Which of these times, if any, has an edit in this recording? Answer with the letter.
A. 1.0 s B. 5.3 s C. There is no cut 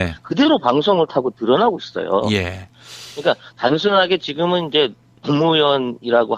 B